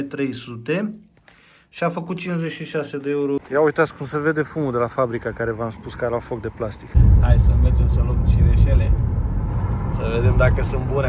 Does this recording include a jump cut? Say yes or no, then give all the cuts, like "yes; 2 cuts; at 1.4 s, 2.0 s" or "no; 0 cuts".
yes; 2 cuts; at 3.4 s, 7.0 s